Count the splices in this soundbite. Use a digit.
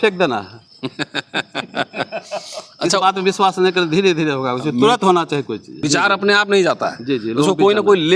1